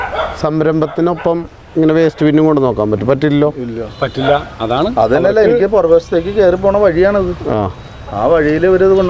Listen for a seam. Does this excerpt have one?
no; 0 cuts

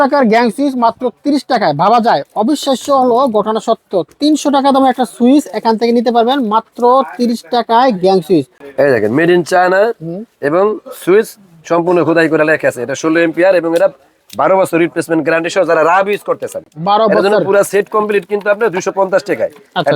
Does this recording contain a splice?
yes; 1 cut; at 8.6 s

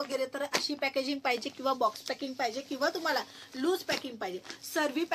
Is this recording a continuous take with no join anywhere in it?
yes; 0 cuts

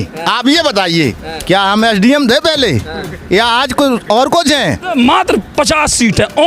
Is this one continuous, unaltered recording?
no; 1 cut; at 4.9 s

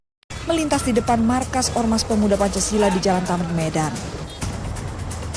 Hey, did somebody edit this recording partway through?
yes; 1 cut; at 1.2 s

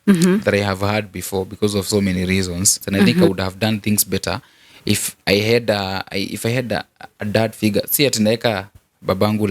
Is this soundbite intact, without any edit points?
no; 1 cut; at 3.2 s

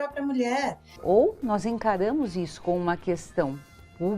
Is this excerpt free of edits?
no; 1 cut; at 1.0 s

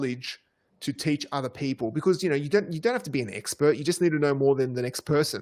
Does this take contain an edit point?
no; 0 cuts

